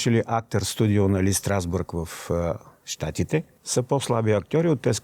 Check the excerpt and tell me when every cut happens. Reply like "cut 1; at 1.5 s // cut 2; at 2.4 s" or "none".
cut 1; at 3.6 s